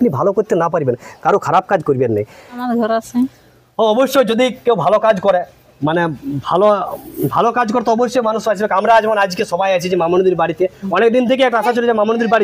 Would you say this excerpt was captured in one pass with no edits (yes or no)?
no